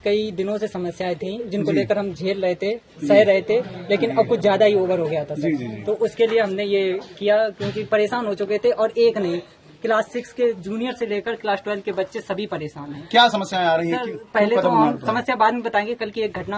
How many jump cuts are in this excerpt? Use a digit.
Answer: 0